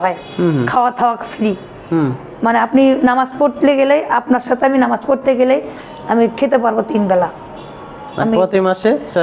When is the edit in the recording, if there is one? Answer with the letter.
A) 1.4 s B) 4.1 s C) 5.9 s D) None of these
D